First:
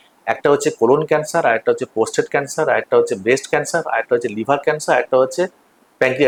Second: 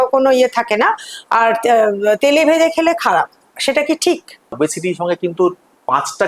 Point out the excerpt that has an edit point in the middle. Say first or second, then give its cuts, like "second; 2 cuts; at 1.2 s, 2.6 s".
second; 1 cut; at 4.5 s